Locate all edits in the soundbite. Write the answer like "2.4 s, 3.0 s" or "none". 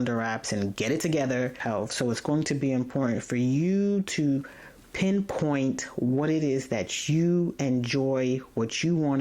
1.6 s